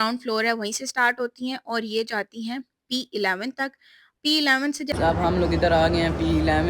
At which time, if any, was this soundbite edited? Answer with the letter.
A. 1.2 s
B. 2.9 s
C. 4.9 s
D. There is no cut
C